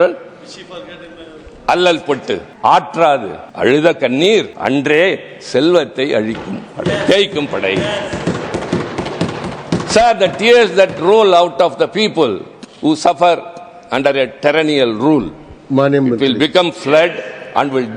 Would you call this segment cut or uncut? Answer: cut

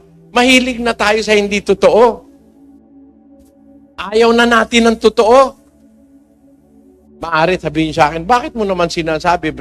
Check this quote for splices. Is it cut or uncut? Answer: uncut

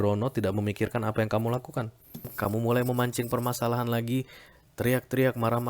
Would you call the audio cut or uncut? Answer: cut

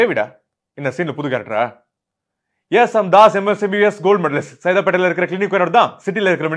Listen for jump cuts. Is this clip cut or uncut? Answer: uncut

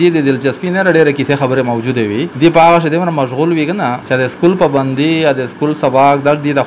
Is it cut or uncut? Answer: cut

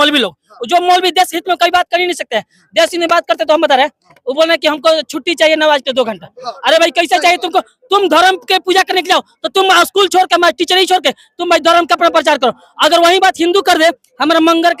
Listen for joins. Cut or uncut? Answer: uncut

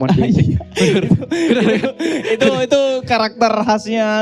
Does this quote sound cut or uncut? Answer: uncut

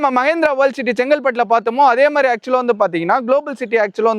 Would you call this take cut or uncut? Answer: uncut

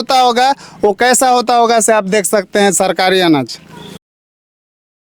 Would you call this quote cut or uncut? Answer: uncut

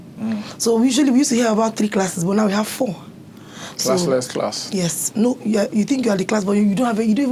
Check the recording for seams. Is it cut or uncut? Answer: uncut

